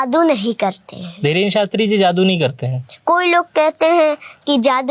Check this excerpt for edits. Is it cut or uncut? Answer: uncut